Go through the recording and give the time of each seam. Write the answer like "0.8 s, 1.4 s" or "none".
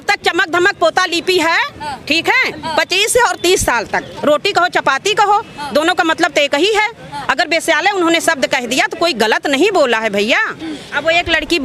4.1 s, 10.9 s